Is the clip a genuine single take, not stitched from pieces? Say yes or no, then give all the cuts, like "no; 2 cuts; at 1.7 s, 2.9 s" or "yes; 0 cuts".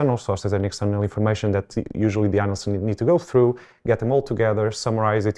yes; 0 cuts